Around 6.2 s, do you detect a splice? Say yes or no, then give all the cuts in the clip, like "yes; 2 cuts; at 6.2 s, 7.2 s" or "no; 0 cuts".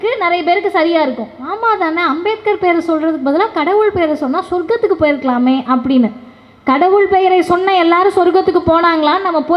no; 0 cuts